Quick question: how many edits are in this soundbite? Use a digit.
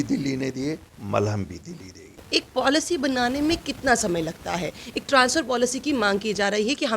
1